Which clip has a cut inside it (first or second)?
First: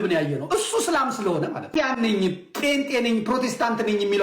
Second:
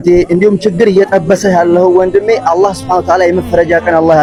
first